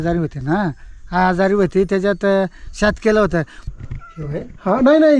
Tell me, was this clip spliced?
yes; 1 cut; at 3.5 s

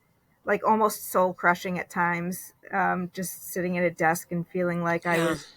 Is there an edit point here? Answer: no; 0 cuts

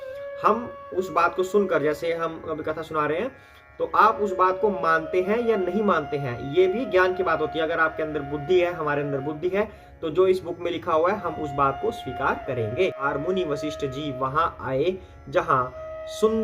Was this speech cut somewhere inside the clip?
yes; 1 cut; at 13.0 s

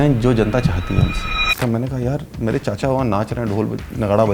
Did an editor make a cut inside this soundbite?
yes; 1 cut; at 1.6 s

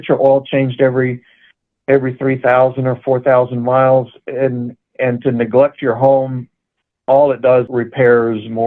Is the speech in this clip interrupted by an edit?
yes; 1 cut; at 7.7 s

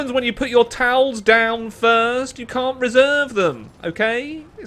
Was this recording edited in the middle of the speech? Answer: no; 0 cuts

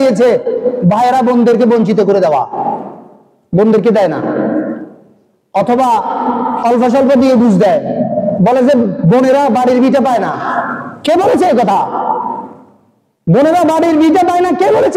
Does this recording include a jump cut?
no; 0 cuts

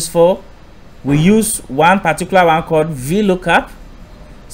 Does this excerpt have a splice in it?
no; 0 cuts

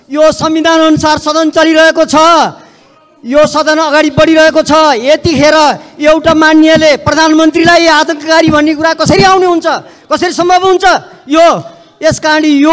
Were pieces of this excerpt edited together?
no; 0 cuts

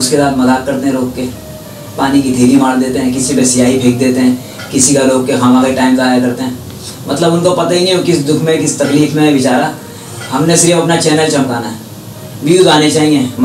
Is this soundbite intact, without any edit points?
yes; 0 cuts

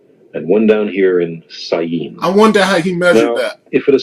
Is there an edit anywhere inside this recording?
yes; 1 cut; at 2.4 s

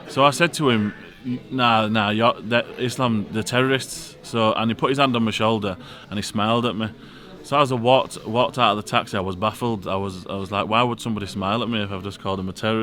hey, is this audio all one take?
yes; 0 cuts

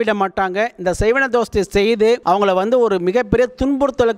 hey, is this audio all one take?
no; 1 cut; at 2.2 s

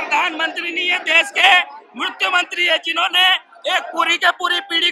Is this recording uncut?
yes; 0 cuts

